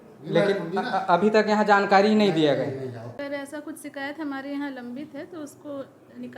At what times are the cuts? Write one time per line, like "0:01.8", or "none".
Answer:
0:03.2